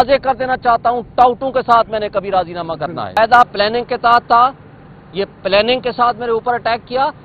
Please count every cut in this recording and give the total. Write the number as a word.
one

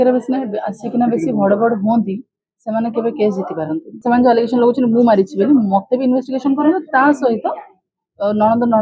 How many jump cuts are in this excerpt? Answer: one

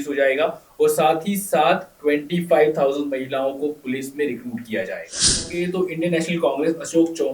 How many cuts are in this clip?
one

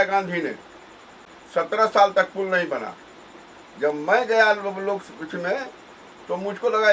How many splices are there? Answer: zero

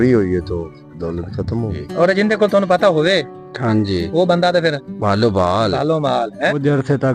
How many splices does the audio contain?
two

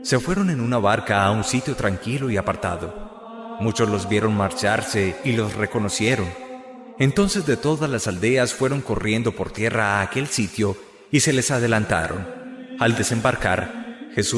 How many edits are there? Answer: zero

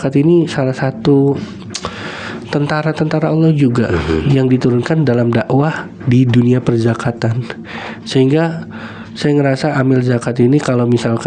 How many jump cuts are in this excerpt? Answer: zero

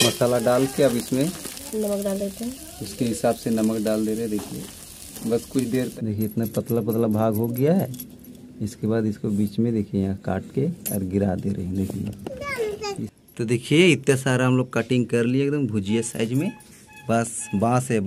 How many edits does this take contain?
two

